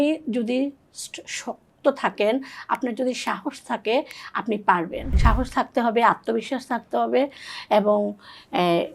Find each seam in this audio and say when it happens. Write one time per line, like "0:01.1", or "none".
0:05.2